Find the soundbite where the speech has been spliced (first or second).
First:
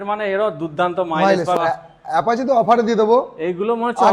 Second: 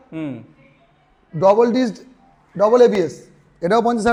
first